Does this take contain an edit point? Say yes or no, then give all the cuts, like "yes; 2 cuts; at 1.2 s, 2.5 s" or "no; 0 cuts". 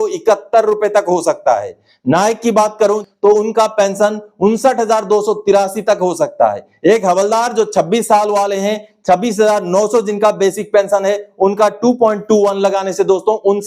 yes; 1 cut; at 3.0 s